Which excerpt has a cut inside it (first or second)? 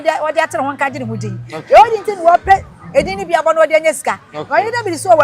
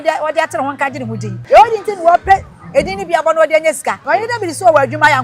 second